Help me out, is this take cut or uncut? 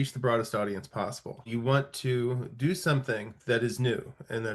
cut